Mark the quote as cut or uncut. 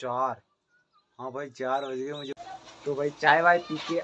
cut